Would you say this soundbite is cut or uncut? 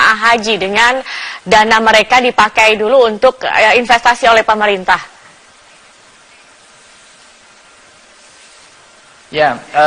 uncut